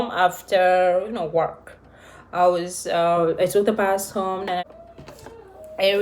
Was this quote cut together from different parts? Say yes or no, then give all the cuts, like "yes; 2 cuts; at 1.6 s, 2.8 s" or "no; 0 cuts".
yes; 1 cut; at 4.6 s